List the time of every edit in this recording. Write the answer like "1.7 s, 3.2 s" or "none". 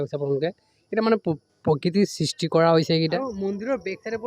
3.2 s